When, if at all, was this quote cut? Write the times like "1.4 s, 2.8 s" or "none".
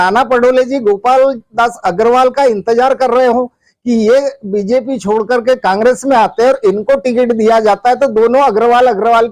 none